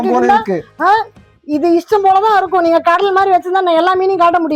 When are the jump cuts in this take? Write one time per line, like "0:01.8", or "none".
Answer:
none